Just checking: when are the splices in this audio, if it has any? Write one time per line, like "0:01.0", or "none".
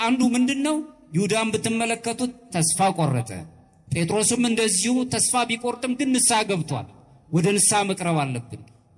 none